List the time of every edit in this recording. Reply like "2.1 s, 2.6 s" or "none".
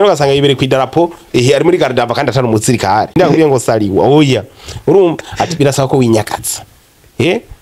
3.2 s